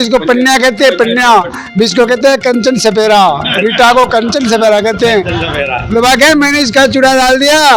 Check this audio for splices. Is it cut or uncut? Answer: uncut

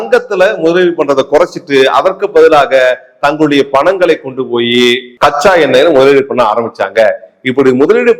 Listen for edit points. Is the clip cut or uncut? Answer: uncut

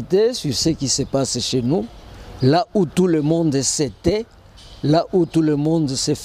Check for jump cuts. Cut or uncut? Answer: uncut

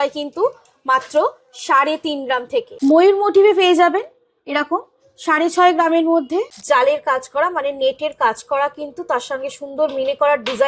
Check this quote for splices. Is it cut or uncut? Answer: cut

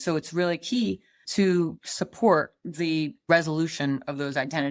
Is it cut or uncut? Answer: cut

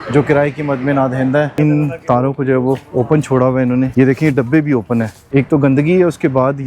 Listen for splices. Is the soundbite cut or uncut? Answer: cut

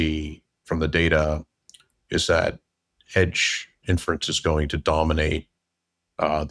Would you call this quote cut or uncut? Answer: uncut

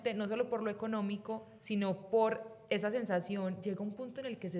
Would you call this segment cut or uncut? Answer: uncut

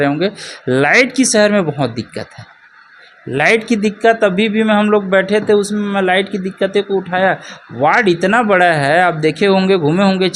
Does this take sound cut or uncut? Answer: uncut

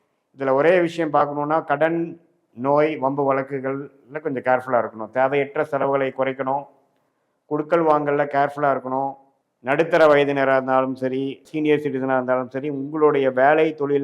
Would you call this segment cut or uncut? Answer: cut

